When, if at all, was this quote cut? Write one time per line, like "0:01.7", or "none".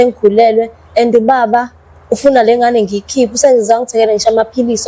none